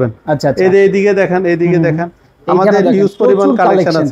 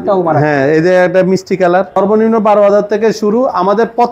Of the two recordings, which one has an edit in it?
second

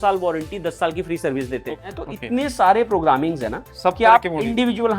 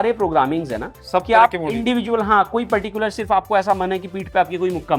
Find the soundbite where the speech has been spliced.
first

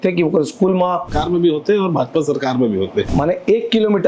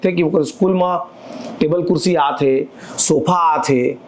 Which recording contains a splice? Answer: first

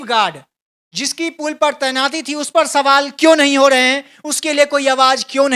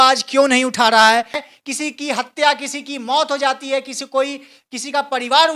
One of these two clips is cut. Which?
second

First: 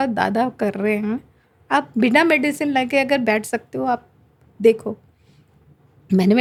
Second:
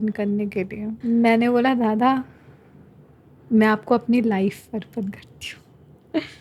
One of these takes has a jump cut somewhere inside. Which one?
second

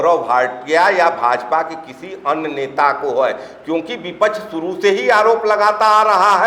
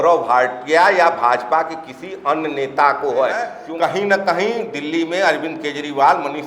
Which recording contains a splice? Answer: second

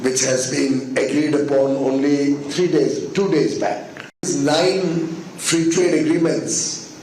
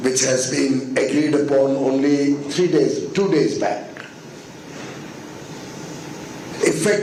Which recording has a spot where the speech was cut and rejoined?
first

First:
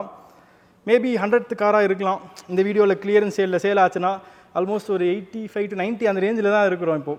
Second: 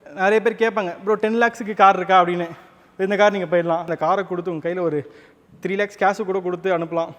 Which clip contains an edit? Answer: second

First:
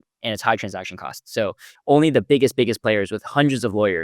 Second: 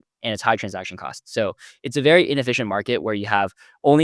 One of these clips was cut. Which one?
first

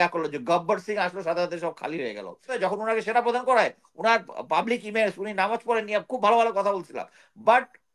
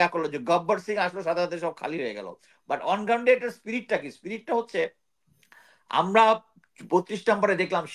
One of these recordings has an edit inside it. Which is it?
first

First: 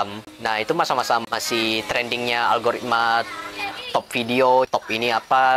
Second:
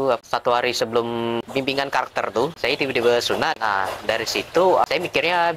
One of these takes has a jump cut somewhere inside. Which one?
second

